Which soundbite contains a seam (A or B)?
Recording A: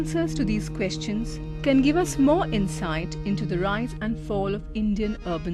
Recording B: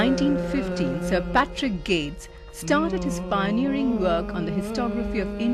B